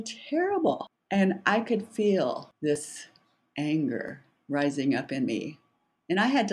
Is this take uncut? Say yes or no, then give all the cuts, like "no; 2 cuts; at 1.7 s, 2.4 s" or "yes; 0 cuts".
no; 2 cuts; at 0.9 s, 2.5 s